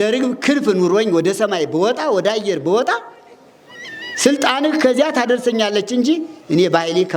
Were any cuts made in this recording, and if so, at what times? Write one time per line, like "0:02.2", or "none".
none